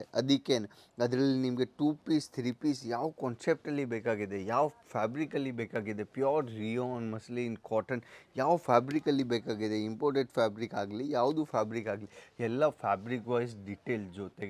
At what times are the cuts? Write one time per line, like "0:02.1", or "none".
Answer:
none